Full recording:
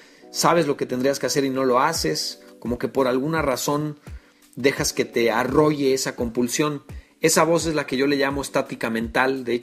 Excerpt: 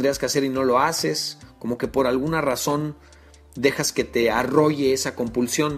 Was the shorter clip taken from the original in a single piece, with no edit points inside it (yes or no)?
yes